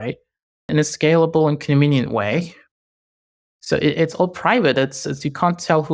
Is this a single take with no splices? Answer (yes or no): yes